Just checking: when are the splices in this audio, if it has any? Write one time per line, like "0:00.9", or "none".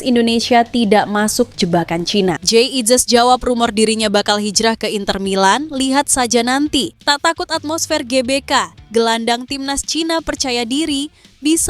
0:02.4
0:06.9